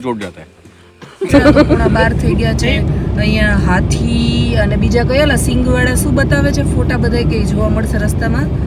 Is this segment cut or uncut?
cut